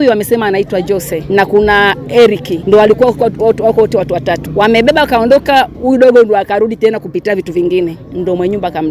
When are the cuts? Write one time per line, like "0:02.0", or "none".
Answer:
none